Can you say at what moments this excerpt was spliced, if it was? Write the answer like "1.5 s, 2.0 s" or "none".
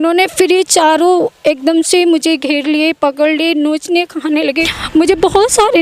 4.7 s